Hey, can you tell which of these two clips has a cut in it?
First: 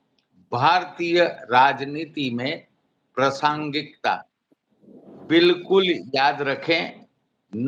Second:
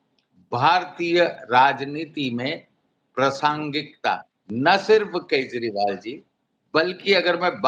second; 1 cut; at 4.4 s

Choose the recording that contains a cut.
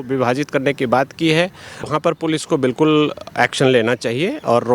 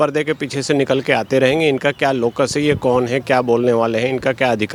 first; 1 cut; at 1.8 s

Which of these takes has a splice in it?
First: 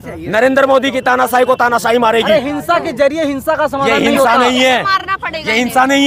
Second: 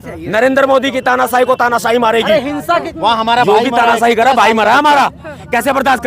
second; 1 cut; at 2.9 s

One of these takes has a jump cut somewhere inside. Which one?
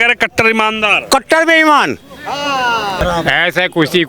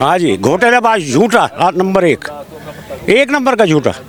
first; 1 cut; at 3.0 s

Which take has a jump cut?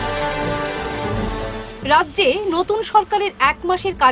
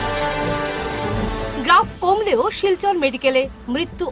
second; 1 cut; at 1.0 s

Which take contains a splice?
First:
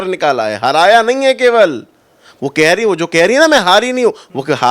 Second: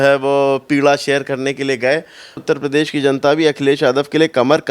second; 1 cut; at 2.4 s

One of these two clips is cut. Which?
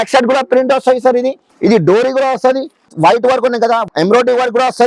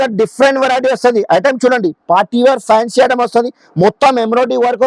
first; 3 cuts; at 1.5 s, 2.9 s, 3.9 s

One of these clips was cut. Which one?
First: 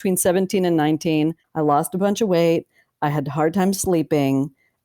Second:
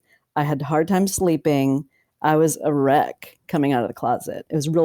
first; 1 cut; at 1.4 s

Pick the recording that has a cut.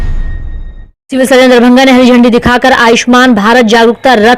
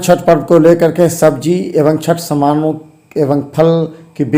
first; 1 cut; at 1.0 s

